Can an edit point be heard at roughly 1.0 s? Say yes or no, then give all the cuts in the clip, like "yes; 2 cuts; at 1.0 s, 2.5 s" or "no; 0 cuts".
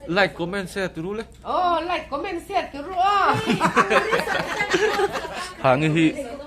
no; 1 cut; at 5.4 s